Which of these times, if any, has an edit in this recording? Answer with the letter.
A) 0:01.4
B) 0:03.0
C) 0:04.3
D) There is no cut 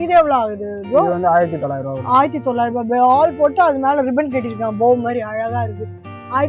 D